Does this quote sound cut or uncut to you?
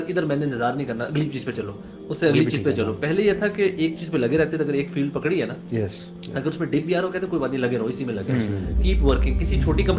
uncut